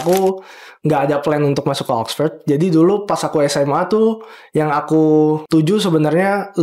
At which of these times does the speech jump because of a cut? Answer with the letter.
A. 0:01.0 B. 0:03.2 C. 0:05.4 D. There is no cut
C